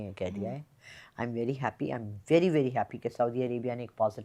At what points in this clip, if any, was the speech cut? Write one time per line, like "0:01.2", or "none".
none